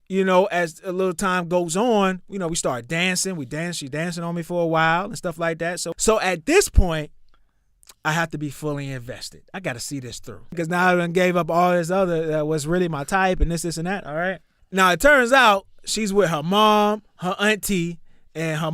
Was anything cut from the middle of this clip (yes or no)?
yes